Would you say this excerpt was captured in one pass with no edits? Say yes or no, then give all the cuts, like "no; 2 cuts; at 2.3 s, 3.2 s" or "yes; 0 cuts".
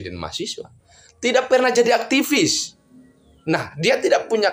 yes; 0 cuts